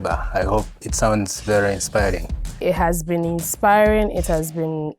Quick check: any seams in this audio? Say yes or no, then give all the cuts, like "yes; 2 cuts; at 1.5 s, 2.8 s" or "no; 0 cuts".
yes; 1 cut; at 2.4 s